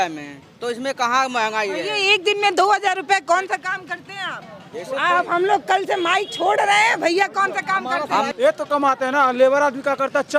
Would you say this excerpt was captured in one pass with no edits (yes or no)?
no